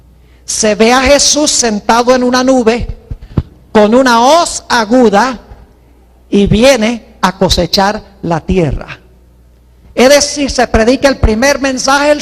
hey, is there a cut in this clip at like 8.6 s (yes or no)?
no